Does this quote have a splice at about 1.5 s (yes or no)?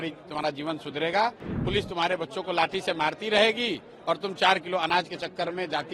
yes